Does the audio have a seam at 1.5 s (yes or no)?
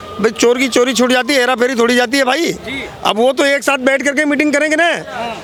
no